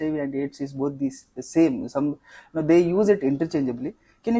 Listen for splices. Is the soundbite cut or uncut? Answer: uncut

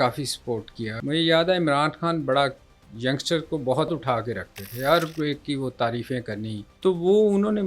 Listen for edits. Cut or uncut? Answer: cut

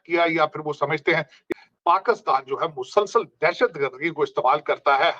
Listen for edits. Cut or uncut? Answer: cut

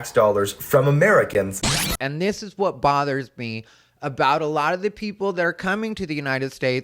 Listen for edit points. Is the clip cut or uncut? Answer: cut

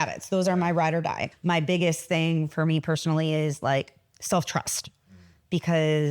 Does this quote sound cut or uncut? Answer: cut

